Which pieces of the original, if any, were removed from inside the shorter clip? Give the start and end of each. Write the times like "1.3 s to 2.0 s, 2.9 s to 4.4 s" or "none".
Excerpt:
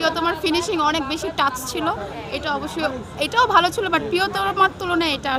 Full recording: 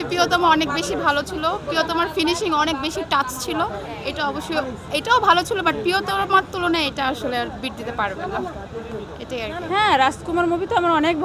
none